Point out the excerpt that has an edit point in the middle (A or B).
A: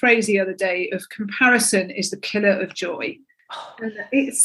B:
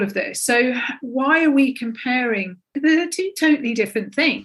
B